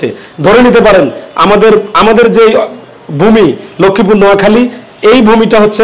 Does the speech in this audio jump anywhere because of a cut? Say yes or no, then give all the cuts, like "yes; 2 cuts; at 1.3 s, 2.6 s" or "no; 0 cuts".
no; 0 cuts